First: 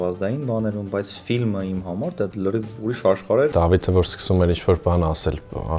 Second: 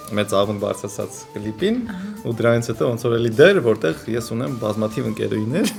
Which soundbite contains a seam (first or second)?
first